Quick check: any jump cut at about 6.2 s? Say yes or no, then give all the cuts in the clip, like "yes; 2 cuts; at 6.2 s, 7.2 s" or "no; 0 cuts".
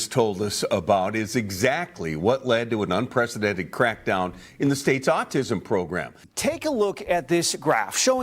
yes; 1 cut; at 6.2 s